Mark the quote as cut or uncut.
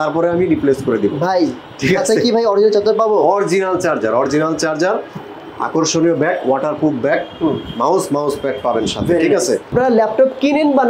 cut